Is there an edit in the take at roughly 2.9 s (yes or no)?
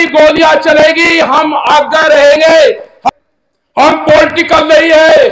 yes